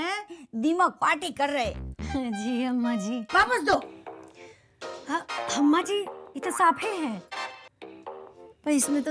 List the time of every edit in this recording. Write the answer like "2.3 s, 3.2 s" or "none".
3.2 s